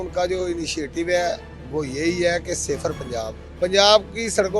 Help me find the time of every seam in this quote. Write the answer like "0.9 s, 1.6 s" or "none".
1.5 s, 3.4 s